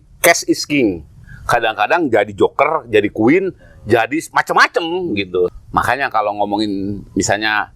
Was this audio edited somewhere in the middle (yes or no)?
yes